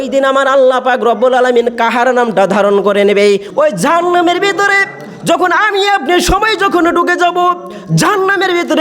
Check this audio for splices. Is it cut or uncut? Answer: cut